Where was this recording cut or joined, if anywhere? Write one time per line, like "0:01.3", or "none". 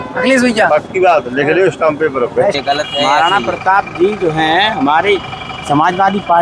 0:02.6